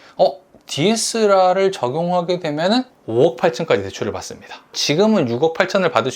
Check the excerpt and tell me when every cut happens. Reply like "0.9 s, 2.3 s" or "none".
4.8 s